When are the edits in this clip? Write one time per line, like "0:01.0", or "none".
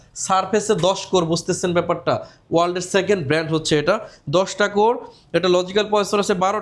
none